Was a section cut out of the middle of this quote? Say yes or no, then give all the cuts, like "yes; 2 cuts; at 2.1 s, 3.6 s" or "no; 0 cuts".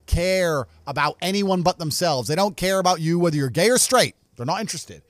no; 0 cuts